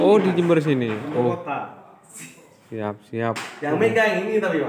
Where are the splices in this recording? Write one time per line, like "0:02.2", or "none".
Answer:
none